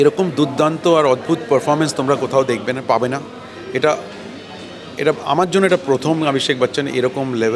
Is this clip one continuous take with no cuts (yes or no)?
yes